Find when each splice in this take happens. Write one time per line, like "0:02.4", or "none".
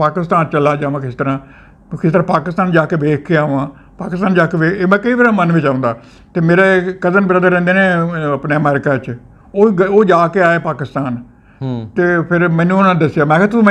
none

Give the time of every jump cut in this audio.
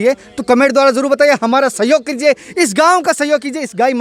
none

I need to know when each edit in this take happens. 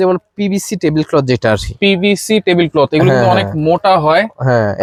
none

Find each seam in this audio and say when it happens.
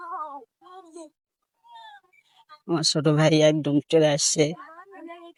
none

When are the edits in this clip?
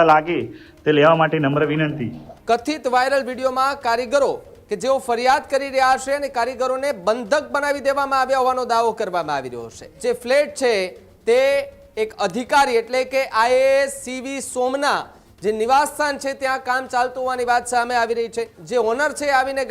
0:02.3
0:09.9
0:18.6

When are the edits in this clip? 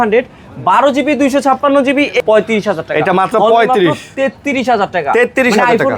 0:02.2

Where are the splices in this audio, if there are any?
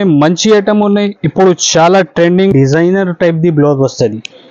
0:02.5

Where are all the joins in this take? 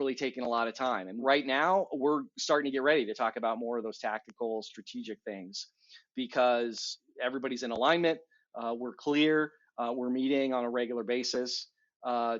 0:01.1

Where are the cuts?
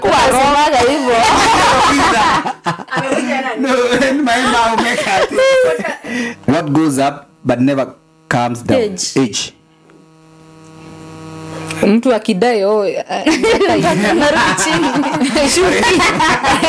0:06.3

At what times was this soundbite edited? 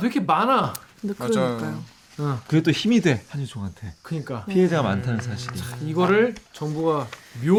none

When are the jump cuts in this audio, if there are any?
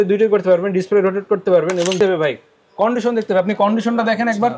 0:02.0

